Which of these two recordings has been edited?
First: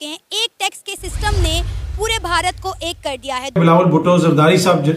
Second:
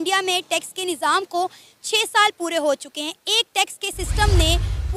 first; 1 cut; at 3.7 s

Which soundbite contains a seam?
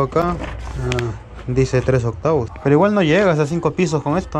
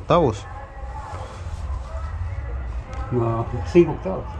first; 1 cut; at 2.5 s

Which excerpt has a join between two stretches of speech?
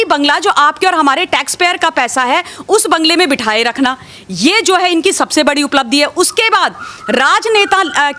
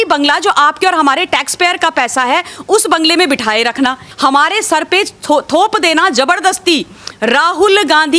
second; 1 cut; at 4.1 s

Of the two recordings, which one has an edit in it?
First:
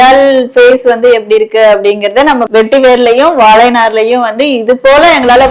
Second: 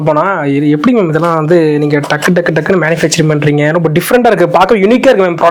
first; 1 cut; at 2.5 s

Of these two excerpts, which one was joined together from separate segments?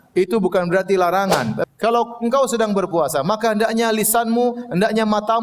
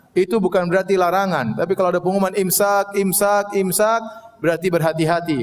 first; 1 cut; at 1.6 s

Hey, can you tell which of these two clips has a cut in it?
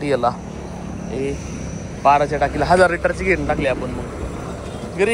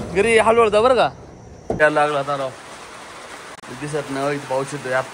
second; 1 cut; at 1.8 s

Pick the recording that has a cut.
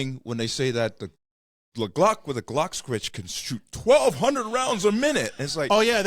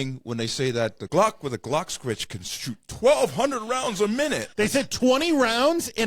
second; 2 cuts; at 1.1 s, 4.5 s

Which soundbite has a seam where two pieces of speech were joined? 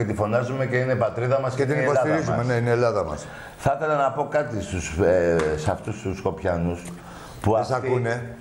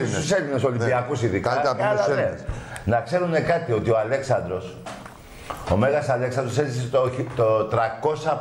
first; 1 cut; at 6.4 s

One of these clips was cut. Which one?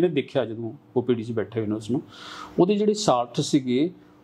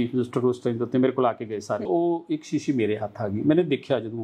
second; 1 cut; at 1.9 s

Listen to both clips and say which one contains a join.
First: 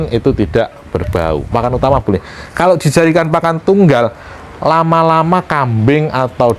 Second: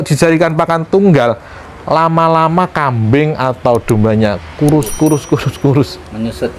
first; 1 cut; at 1.5 s

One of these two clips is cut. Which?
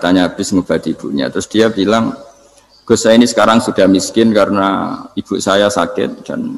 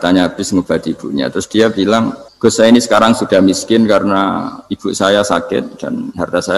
second; 1 cut; at 2.2 s

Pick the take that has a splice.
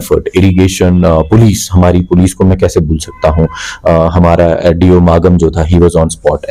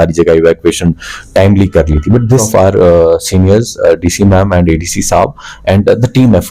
second; 1 cut; at 2.5 s

